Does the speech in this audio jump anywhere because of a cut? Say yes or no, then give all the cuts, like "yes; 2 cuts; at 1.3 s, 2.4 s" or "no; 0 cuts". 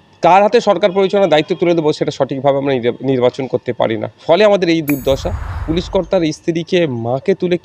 yes; 1 cut; at 5.6 s